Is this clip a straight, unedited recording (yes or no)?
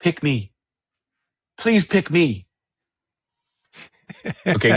yes